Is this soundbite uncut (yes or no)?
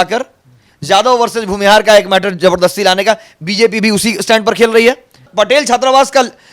no